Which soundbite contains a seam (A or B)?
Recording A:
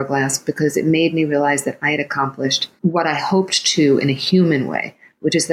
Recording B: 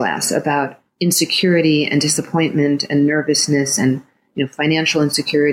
A